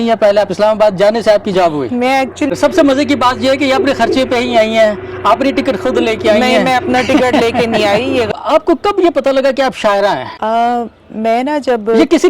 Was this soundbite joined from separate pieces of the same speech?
yes; 2 cuts; at 2.5 s, 8.3 s

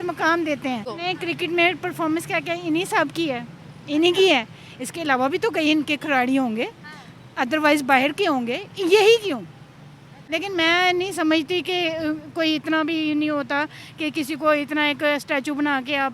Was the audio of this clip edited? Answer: yes; 2 cuts; at 0.9 s, 10.1 s

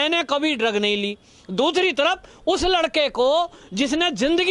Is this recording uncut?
yes; 0 cuts

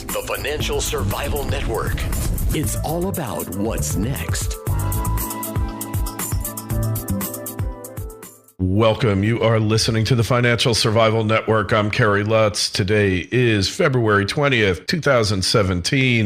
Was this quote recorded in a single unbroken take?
no; 1 cut; at 8.4 s

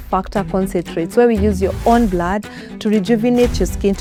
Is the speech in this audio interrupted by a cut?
no; 0 cuts

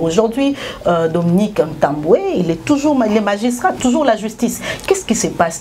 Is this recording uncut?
yes; 0 cuts

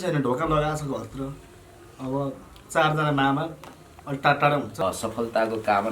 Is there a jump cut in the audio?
yes; 1 cut; at 4.7 s

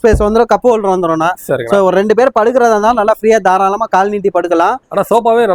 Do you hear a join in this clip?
no; 0 cuts

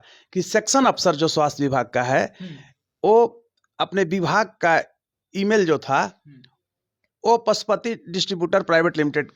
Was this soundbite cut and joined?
no; 0 cuts

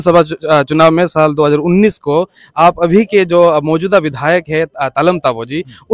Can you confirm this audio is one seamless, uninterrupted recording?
yes; 0 cuts

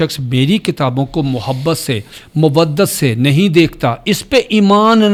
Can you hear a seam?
no; 0 cuts

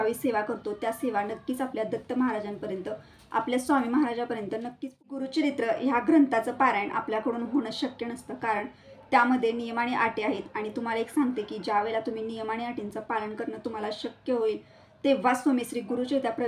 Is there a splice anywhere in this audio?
yes; 1 cut; at 5.0 s

